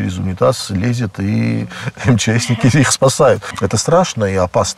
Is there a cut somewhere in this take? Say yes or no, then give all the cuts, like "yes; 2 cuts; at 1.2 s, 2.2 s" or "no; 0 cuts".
yes; 1 cut; at 3.5 s